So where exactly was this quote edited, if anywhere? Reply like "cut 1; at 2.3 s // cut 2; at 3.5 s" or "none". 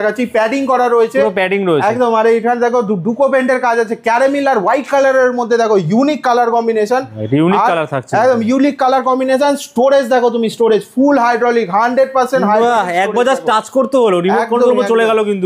none